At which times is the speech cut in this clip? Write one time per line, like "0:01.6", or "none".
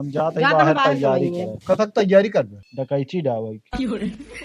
0:01.5
0:02.6